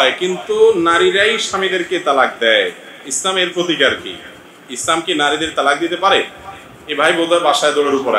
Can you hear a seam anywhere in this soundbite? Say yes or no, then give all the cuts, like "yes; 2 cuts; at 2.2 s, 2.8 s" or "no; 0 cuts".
no; 0 cuts